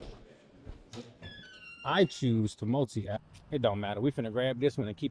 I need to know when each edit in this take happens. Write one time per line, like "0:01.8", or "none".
0:03.2

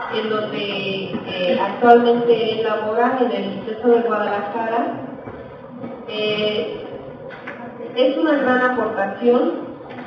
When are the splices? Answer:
0:04.5

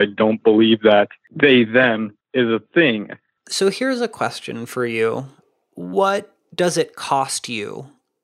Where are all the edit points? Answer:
0:01.2
0:02.2
0:03.4

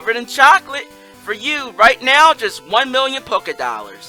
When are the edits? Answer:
none

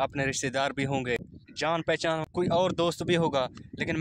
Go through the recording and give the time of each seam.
0:01.4
0:02.2

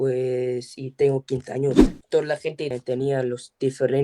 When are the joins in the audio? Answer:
0:01.9

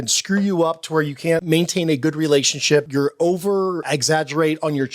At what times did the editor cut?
0:01.4
0:02.9
0:03.9

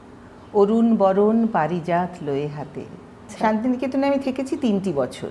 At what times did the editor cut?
0:03.3

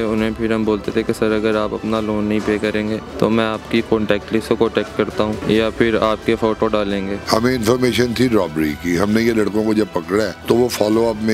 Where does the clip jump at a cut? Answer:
0:03.1
0:05.4
0:07.2
0:10.4

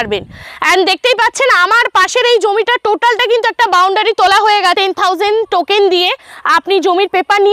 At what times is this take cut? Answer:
0:04.8

